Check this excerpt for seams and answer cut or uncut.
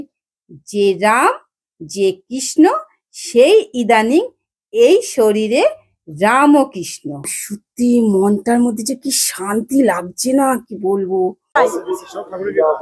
cut